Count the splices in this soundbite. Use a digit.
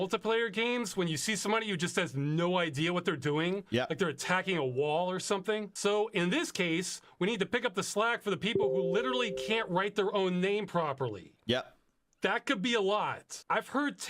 1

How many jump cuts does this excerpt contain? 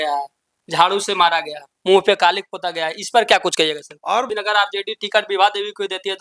1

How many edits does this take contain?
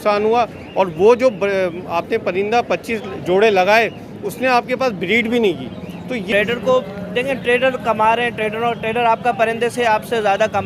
1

